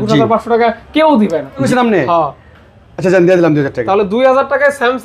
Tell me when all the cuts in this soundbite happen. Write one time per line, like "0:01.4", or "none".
0:01.7